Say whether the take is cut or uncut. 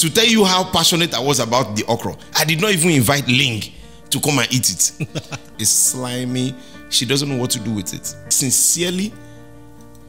cut